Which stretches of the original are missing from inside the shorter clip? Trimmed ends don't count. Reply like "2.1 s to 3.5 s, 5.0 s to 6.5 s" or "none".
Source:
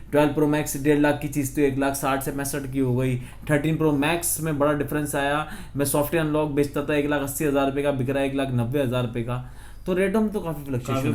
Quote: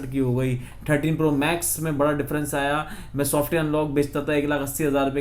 none